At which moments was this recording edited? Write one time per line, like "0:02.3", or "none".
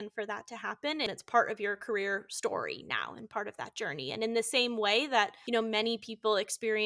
0:01.1
0:05.4